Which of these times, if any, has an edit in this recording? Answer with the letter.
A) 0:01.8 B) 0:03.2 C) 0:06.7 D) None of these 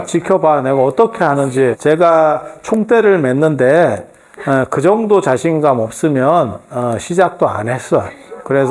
A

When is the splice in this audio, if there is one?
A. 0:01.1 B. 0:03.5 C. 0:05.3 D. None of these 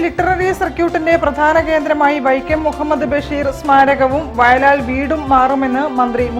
D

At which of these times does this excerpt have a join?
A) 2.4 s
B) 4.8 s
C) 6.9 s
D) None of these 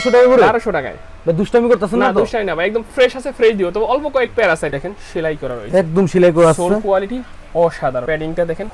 B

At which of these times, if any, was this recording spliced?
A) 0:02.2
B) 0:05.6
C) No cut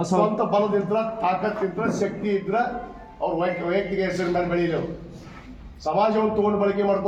C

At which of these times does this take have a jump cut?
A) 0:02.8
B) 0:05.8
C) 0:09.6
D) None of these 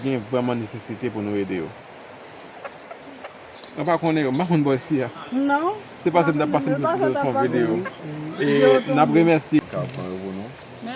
C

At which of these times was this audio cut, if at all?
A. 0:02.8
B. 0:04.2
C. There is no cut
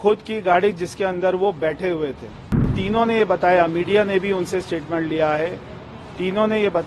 A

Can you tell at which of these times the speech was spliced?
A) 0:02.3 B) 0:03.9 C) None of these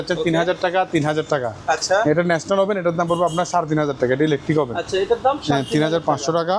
C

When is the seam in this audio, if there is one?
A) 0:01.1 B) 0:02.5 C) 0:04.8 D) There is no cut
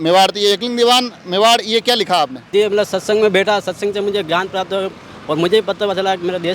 B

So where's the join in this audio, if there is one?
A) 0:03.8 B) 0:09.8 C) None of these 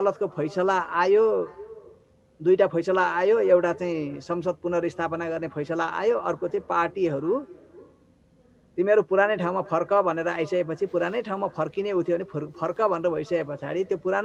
C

